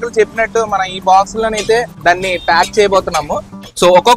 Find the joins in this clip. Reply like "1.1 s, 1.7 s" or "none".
none